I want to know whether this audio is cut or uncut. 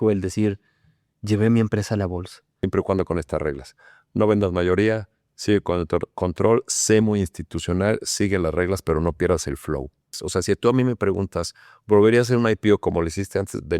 cut